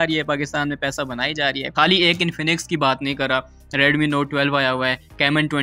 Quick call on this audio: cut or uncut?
cut